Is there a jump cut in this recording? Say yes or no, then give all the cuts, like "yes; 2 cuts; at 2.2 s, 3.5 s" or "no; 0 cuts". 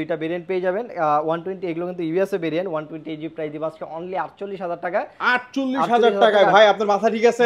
no; 0 cuts